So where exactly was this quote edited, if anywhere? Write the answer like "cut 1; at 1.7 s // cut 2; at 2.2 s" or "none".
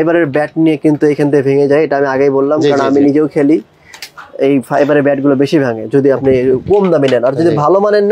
none